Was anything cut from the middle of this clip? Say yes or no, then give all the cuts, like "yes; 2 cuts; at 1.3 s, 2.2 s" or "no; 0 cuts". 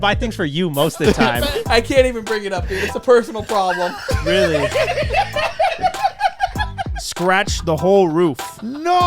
yes; 2 cuts; at 1.6 s, 7.0 s